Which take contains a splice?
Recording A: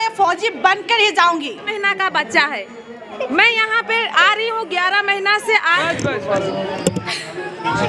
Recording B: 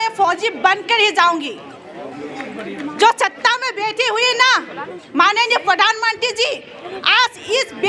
A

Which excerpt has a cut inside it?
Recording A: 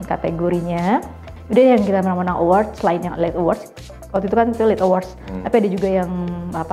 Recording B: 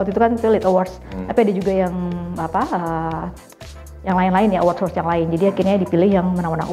A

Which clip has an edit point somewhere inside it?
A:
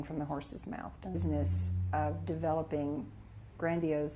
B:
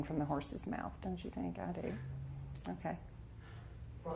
B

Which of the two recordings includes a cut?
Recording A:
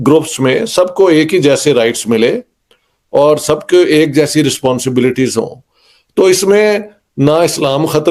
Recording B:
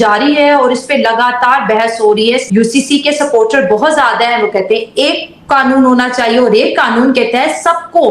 B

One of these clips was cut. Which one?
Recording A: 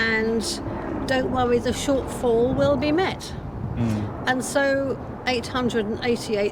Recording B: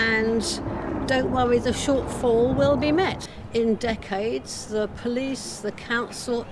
B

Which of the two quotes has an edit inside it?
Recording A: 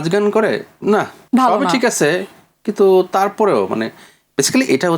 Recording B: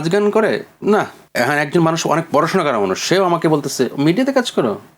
B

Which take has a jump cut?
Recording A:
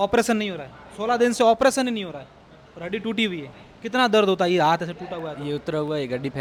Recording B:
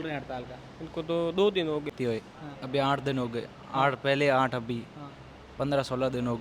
B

